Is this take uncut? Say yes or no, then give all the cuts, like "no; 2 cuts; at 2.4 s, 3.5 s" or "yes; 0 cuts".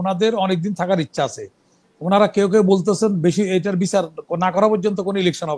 yes; 0 cuts